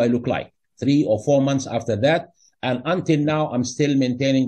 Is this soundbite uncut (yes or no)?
yes